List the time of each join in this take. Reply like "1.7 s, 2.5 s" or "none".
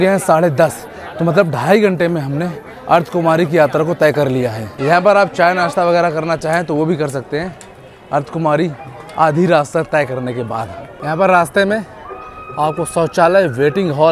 none